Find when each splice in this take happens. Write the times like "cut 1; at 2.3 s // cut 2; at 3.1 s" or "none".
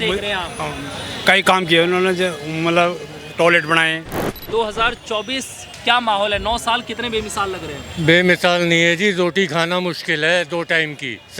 cut 1; at 4.5 s